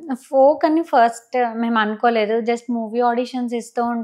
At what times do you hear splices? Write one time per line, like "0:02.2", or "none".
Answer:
none